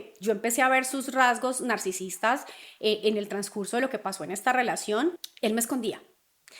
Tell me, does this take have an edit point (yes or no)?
yes